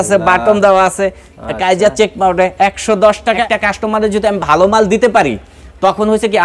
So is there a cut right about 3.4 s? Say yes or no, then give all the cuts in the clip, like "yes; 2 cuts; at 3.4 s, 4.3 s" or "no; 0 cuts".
yes; 1 cut; at 3.4 s